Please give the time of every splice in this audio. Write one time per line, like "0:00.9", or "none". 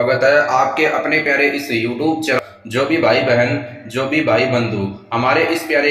0:02.4